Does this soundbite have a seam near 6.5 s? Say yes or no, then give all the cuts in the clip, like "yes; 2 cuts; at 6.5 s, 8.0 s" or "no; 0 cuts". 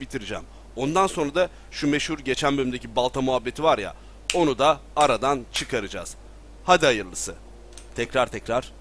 no; 1 cut; at 1.4 s